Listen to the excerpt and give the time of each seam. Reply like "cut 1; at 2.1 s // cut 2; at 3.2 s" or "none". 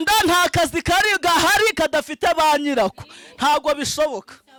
none